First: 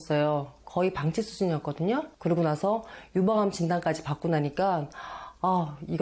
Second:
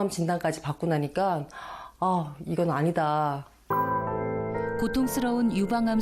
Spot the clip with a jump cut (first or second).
second